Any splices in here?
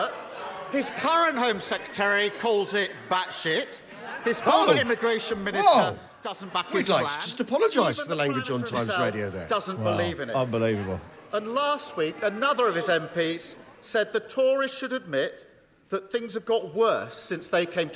no; 0 cuts

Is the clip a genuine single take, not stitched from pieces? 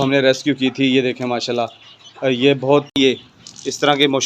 no; 1 cut; at 2.9 s

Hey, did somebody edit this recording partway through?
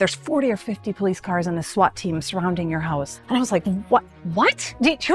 yes; 1 cut; at 3.1 s

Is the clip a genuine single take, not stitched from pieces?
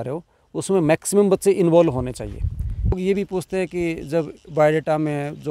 no; 1 cut; at 3.0 s

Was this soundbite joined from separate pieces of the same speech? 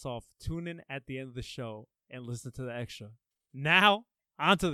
no; 0 cuts

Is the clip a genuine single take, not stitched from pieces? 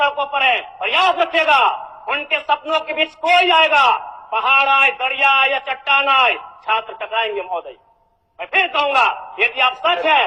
yes; 0 cuts

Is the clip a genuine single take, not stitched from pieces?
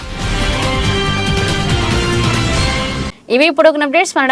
yes; 0 cuts

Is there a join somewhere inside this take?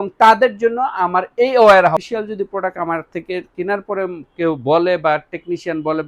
yes; 1 cut; at 2.0 s

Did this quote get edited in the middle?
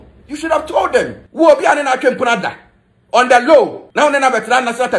yes; 2 cuts; at 1.2 s, 3.8 s

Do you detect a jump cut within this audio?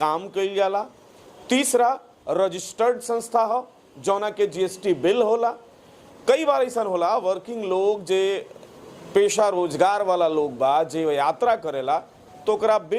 no; 0 cuts

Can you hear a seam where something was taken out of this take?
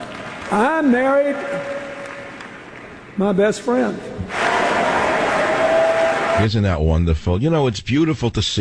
yes; 1 cut; at 6.4 s

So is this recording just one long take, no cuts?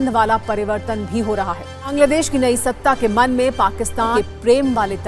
no; 2 cuts; at 1.7 s, 4.1 s

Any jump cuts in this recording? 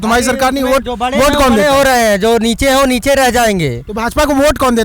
no; 0 cuts

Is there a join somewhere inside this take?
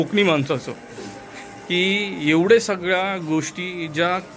no; 0 cuts

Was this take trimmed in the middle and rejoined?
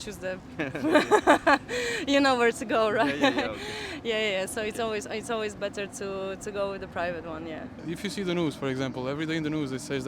yes; 1 cut; at 7.8 s

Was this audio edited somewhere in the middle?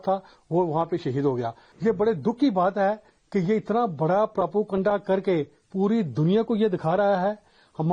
yes; 1 cut; at 1.6 s

